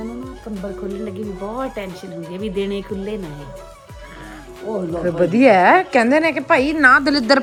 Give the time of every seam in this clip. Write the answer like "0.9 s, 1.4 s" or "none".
none

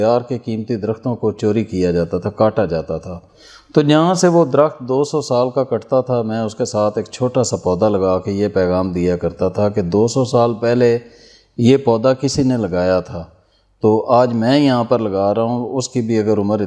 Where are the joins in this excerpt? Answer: none

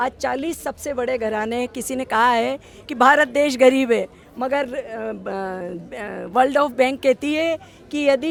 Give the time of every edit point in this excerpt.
none

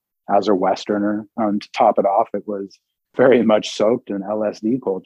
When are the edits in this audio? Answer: 1.3 s, 3.0 s

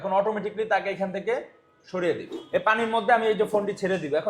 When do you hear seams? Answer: 2.3 s

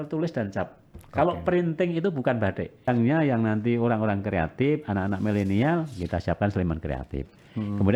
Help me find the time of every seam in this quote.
2.9 s

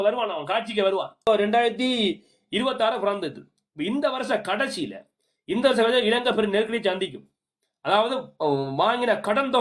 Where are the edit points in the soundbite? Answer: 1.2 s

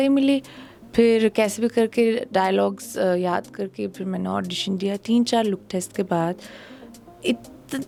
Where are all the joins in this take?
none

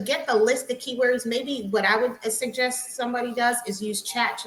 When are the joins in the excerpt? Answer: none

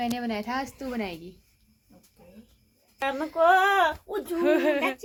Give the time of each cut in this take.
none

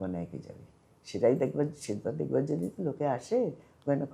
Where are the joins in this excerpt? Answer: none

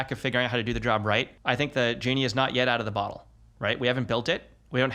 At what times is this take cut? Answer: 1.3 s

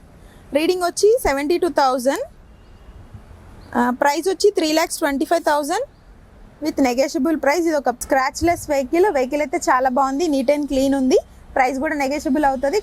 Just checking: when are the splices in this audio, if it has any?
none

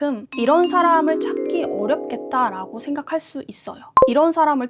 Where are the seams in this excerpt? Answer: none

